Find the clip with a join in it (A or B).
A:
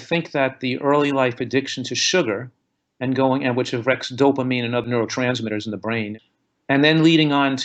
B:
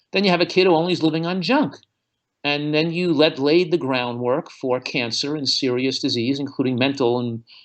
A